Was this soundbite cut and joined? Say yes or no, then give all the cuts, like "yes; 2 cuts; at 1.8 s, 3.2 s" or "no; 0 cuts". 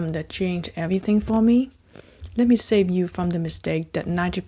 no; 0 cuts